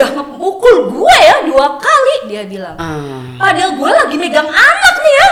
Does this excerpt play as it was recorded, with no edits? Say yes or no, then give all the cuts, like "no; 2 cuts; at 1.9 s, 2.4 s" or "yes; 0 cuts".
yes; 0 cuts